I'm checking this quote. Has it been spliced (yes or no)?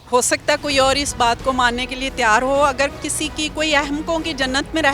no